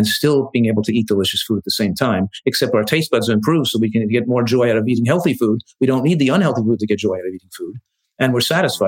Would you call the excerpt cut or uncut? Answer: uncut